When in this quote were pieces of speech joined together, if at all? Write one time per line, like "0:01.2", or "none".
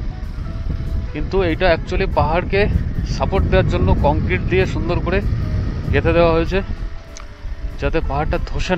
none